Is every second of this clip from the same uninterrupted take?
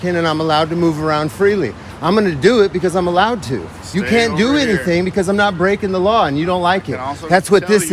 yes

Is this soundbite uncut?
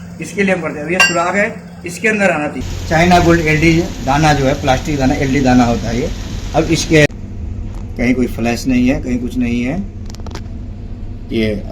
no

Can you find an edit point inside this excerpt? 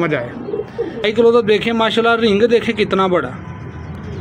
yes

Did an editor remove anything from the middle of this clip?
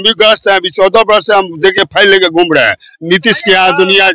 no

